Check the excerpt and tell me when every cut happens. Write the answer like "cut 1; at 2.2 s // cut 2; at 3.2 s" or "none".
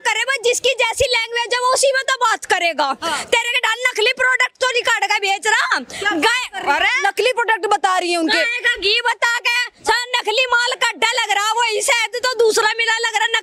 none

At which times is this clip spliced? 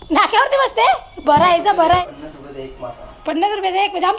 cut 1; at 2.0 s

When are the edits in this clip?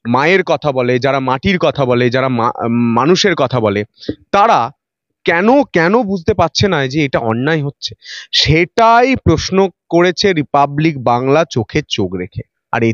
none

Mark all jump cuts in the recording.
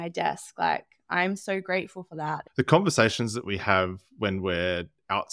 cut 1; at 2.4 s

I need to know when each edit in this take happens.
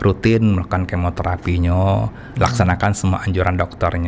none

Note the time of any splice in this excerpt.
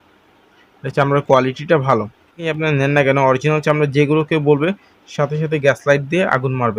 cut 1; at 2.4 s

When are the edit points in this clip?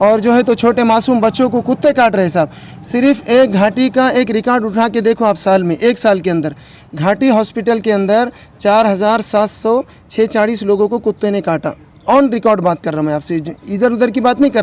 none

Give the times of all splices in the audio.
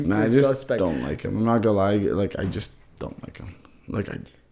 none

